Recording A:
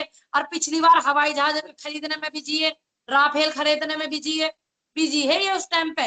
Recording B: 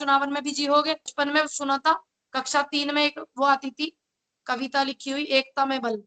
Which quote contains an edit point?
B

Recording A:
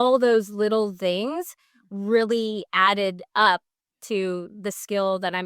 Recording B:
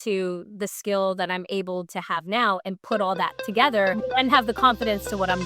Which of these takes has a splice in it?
B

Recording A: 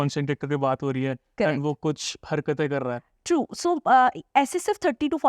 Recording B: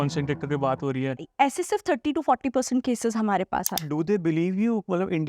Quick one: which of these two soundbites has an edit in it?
B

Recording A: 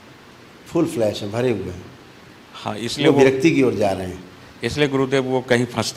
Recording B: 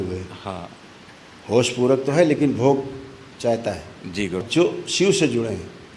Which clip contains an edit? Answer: B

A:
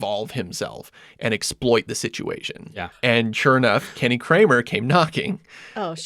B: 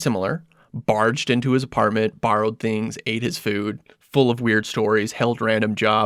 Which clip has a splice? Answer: A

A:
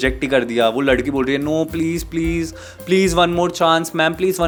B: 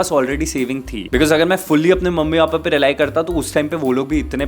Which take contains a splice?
B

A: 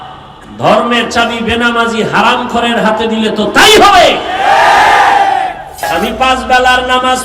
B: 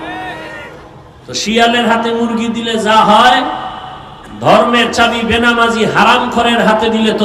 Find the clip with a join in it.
A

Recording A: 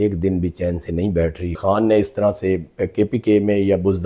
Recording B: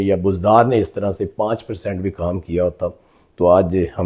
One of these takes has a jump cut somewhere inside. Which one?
A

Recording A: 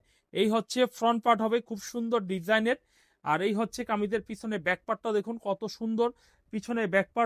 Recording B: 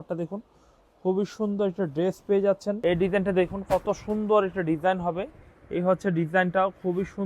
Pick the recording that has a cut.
B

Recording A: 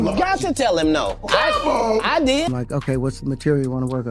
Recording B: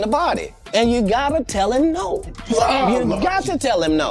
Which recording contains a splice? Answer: A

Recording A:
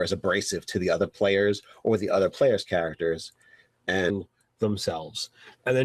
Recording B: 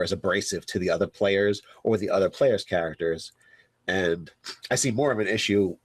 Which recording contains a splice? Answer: B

